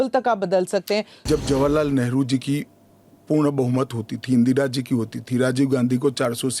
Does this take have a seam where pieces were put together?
yes; 1 cut; at 1.1 s

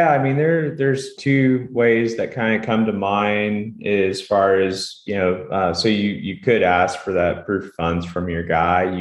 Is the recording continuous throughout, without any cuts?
no; 1 cut; at 1.1 s

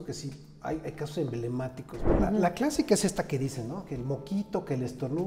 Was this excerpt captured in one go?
no; 1 cut; at 2.0 s

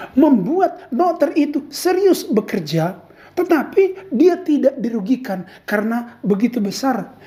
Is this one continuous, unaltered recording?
yes; 0 cuts

